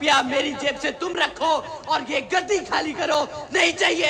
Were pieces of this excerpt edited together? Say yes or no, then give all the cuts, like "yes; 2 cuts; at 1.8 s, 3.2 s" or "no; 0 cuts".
no; 0 cuts